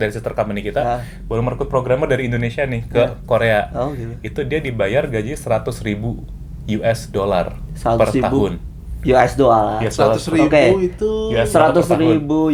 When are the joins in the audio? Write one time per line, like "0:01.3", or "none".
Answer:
none